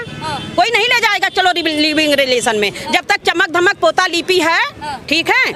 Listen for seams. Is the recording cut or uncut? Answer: uncut